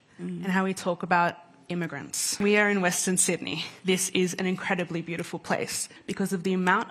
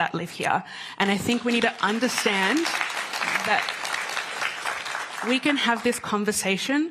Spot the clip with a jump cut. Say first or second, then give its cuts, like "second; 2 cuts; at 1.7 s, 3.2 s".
first; 3 cuts; at 2.3 s, 3.6 s, 6.0 s